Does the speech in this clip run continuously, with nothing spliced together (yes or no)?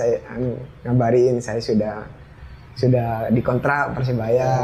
yes